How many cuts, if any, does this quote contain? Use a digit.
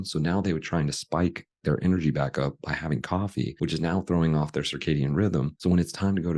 2